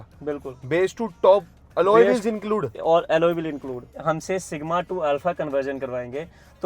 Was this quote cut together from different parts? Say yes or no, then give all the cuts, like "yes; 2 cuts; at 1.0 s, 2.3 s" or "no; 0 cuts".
yes; 1 cut; at 3.9 s